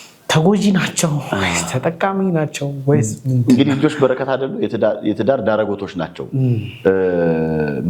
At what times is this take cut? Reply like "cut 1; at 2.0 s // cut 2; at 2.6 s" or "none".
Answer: none